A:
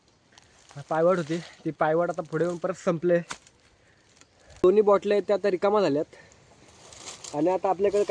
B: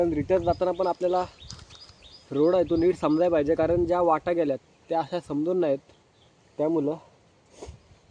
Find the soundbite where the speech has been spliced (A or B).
A